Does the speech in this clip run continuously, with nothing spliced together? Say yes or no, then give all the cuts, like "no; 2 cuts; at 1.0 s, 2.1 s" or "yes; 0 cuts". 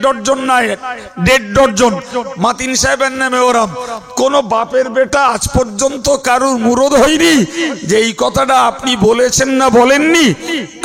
yes; 0 cuts